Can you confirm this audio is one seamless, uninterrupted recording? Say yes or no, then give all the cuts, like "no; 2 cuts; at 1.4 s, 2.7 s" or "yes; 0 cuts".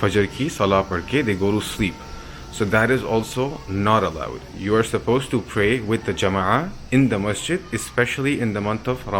yes; 0 cuts